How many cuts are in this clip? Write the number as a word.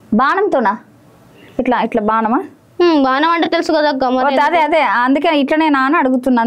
zero